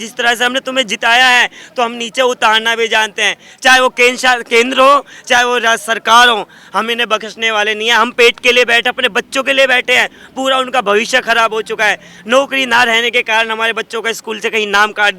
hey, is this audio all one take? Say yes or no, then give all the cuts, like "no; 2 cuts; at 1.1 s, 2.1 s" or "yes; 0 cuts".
yes; 0 cuts